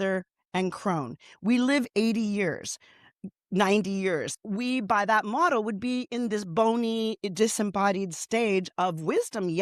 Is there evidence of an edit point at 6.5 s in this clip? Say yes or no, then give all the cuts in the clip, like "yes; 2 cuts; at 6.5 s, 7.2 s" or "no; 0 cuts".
no; 1 cut; at 4.3 s